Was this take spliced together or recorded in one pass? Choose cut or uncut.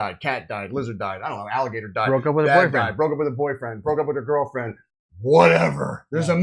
uncut